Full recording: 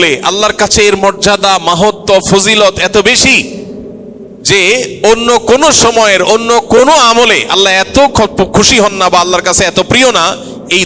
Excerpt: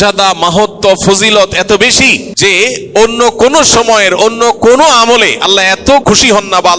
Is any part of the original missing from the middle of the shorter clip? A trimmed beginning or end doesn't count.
yes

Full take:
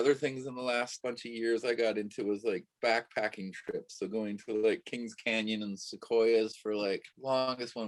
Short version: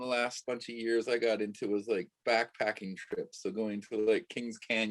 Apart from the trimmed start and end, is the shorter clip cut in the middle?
no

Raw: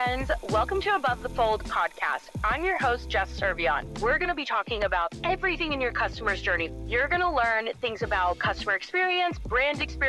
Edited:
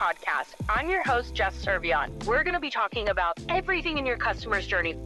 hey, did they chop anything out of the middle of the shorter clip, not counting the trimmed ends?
no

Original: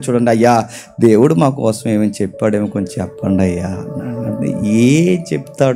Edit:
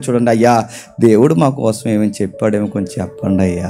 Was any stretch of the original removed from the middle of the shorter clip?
no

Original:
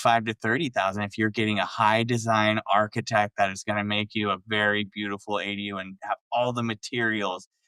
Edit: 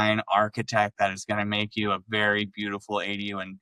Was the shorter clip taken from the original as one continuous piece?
yes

